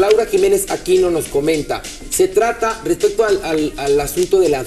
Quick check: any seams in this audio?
no; 0 cuts

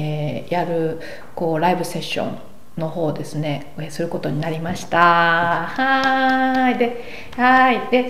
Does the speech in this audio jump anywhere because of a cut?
no; 0 cuts

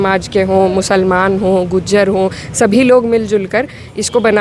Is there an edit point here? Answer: no; 0 cuts

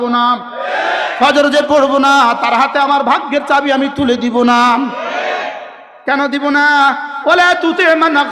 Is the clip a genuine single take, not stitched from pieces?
yes; 0 cuts

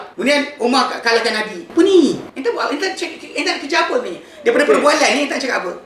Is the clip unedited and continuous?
yes; 0 cuts

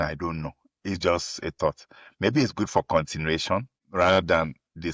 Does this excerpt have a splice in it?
yes; 1 cut; at 3.8 s

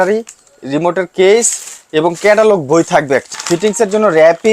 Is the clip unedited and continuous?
no; 1 cut; at 3.3 s

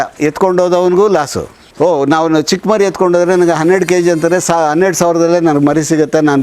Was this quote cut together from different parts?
yes; 1 cut; at 1.6 s

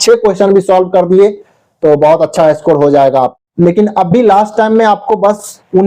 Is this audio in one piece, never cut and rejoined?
no; 1 cut; at 3.3 s

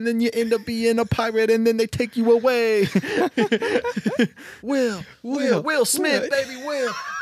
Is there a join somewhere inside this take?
yes; 1 cut; at 4.5 s

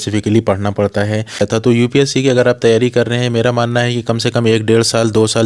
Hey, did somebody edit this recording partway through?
yes; 1 cut; at 1.4 s

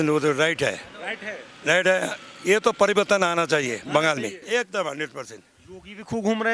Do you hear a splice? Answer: no; 0 cuts

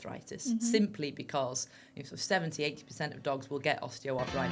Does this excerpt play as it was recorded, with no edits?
yes; 0 cuts

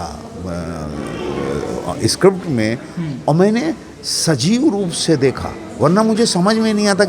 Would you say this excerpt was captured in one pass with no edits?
yes; 0 cuts

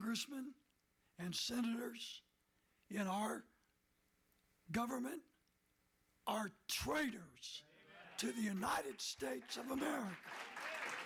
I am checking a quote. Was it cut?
no; 0 cuts

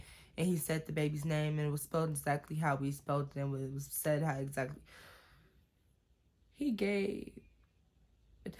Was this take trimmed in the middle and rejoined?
no; 0 cuts

